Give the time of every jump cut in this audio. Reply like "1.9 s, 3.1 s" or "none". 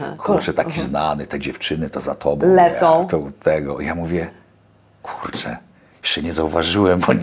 none